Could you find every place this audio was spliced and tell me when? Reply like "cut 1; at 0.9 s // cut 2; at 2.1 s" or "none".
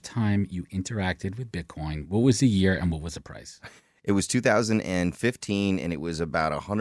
none